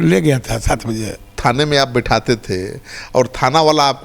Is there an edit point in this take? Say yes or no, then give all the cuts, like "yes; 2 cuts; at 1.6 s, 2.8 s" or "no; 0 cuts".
yes; 1 cut; at 1.4 s